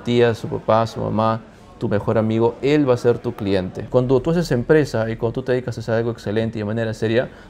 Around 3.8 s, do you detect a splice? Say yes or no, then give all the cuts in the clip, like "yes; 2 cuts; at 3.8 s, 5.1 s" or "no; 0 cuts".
yes; 1 cut; at 3.8 s